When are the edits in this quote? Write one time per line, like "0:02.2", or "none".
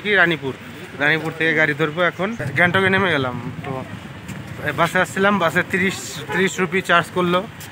0:02.5

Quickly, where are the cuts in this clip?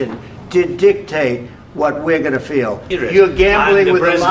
0:02.9

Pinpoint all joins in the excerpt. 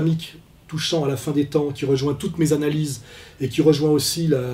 0:03.2

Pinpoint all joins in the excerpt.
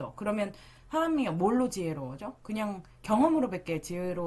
none

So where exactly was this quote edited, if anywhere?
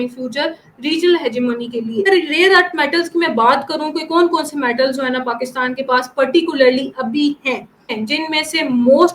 0:02.0
0:07.8

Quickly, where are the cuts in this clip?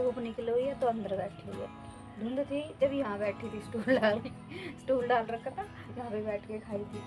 none

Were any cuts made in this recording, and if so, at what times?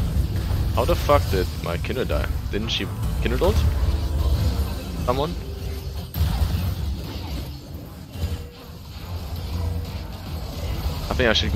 0:08.4

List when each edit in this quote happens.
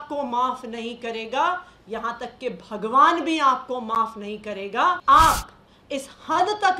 0:05.0

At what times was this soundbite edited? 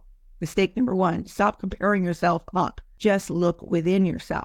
0:02.8

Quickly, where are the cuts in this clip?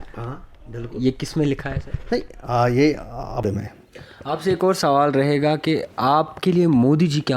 0:03.4

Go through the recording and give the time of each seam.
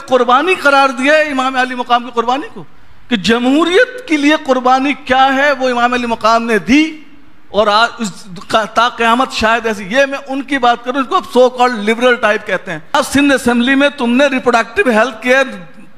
0:13.0

